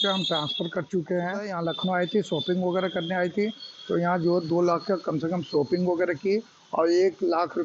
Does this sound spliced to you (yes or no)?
yes